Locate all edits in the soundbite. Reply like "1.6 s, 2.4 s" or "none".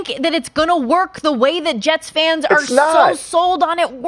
none

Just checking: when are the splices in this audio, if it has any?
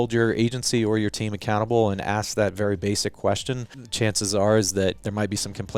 3.8 s, 5.0 s

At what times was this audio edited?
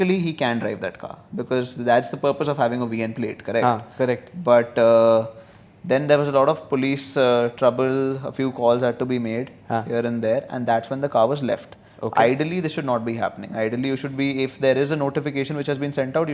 none

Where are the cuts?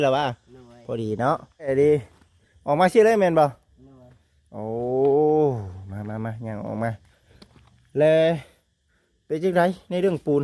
1.7 s

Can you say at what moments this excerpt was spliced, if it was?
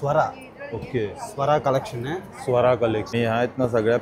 3.1 s

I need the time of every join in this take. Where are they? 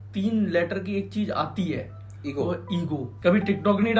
3.0 s

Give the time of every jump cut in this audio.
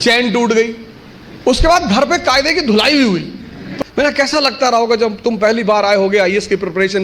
3.6 s

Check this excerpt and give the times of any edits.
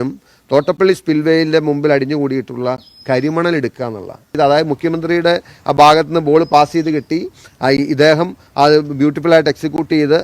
4.4 s

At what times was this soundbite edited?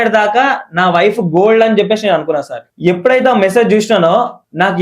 none

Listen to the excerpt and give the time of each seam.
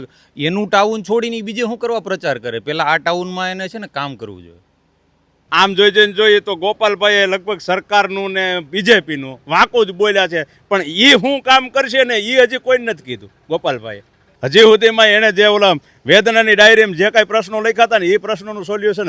5.4 s, 14.3 s

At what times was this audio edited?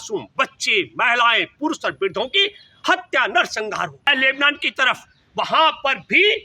4.1 s

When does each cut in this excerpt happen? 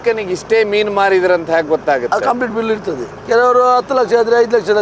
3.1 s

